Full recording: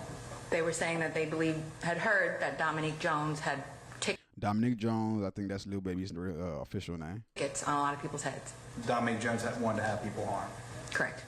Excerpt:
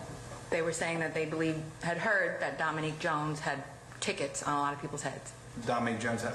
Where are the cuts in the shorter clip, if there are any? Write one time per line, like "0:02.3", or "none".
0:04.2